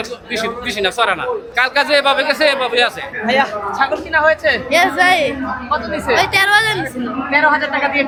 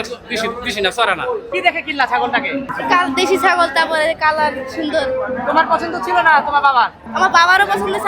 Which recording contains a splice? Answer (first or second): second